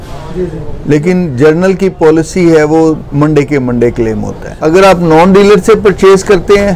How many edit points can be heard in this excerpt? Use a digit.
1